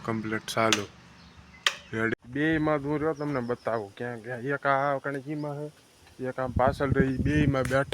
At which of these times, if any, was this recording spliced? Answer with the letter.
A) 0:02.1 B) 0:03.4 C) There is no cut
A